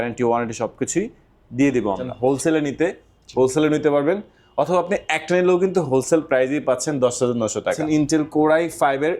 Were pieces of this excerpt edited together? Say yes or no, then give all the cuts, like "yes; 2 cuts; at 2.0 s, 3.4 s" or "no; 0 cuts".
yes; 2 cuts; at 2.1 s, 7.8 s